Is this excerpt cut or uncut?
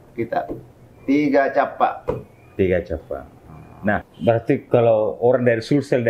cut